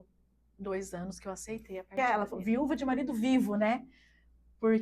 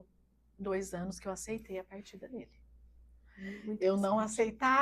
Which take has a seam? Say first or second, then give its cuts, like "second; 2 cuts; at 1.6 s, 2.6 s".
first; 1 cut; at 2.0 s